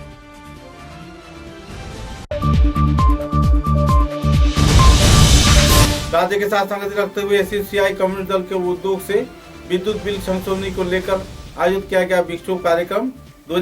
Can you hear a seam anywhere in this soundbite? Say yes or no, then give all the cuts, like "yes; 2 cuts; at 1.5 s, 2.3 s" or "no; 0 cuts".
no; 0 cuts